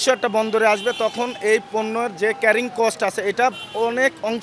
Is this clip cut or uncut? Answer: uncut